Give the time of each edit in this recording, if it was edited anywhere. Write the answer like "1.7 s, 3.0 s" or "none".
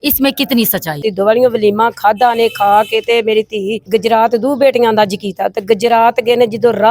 0.9 s, 3.8 s